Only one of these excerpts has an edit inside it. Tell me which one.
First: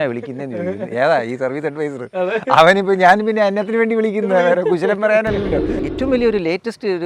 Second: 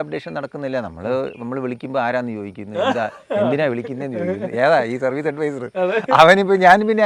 first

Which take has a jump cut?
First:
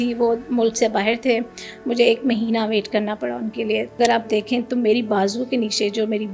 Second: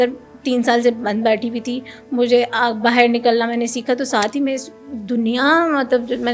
first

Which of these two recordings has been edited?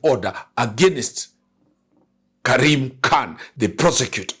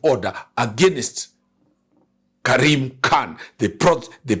first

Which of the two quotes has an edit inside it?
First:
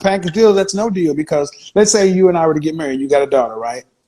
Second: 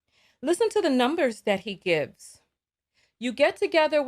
second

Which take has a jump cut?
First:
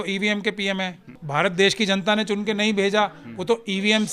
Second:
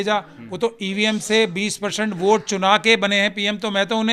first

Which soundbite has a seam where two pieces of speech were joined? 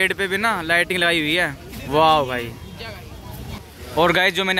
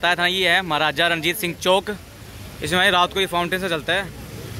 first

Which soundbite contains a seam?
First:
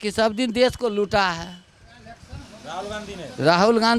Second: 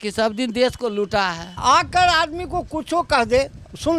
second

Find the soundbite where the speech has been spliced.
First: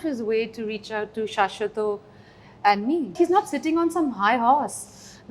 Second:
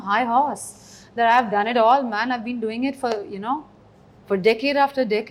first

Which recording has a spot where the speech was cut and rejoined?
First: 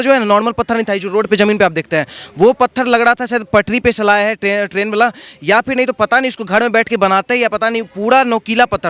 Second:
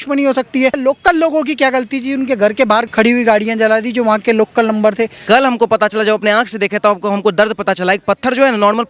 second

